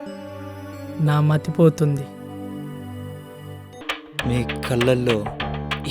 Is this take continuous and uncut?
no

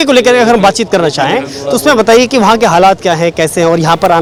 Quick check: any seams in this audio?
no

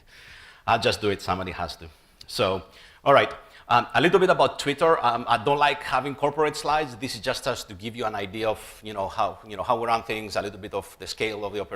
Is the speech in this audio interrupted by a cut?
yes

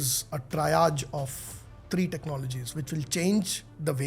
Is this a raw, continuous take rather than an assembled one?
yes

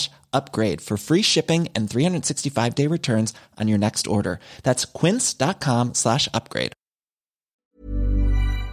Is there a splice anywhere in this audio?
yes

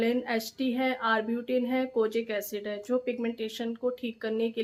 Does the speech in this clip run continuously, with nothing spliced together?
yes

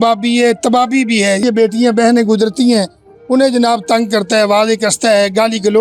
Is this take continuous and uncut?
no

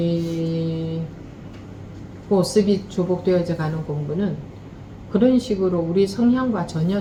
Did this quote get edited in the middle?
no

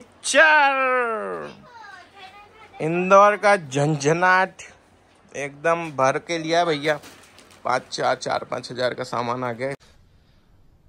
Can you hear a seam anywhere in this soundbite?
no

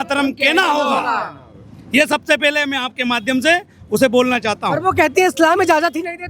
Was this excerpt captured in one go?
yes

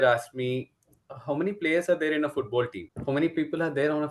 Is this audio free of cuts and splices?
yes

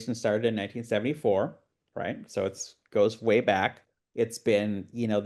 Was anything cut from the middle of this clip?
no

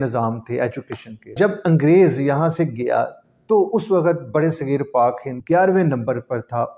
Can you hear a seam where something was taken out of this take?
yes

